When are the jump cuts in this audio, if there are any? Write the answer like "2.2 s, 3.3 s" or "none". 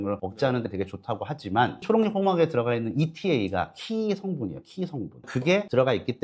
none